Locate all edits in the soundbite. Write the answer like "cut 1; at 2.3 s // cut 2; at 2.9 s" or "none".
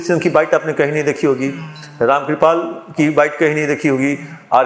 none